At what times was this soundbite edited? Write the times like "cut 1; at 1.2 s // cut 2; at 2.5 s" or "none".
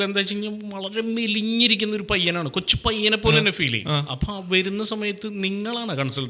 none